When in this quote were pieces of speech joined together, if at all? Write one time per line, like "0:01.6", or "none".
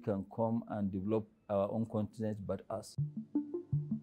0:02.9